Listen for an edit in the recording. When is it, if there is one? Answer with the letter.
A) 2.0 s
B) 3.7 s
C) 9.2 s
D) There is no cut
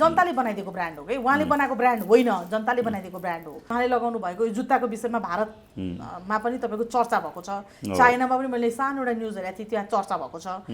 B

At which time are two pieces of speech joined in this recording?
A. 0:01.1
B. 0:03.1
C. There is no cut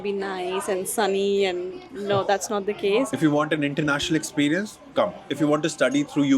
B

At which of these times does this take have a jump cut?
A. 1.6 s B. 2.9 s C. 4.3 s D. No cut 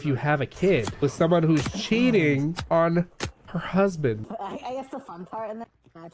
C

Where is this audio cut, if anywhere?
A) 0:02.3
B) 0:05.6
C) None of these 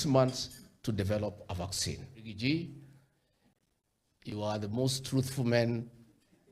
A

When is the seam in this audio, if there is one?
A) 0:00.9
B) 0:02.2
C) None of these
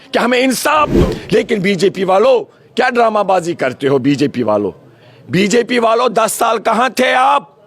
A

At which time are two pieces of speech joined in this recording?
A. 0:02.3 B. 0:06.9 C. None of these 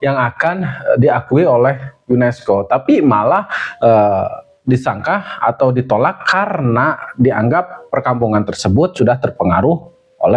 C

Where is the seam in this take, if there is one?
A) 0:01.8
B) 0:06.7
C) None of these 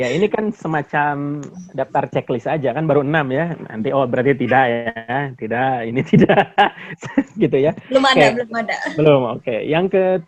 C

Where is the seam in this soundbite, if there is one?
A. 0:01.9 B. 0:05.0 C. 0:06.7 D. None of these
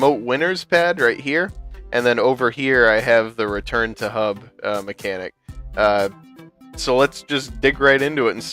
B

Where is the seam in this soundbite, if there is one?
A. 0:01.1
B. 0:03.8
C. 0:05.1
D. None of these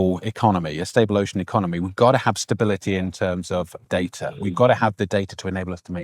B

